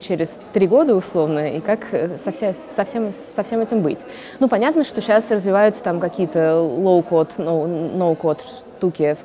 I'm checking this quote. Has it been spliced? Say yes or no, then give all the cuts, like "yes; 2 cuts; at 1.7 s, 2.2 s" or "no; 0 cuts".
no; 0 cuts